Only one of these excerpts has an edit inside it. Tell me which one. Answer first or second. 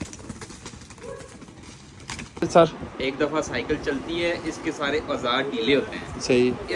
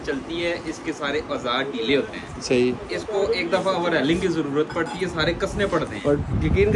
first